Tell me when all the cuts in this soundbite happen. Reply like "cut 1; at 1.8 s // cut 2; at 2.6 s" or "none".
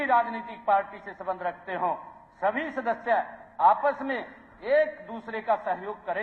none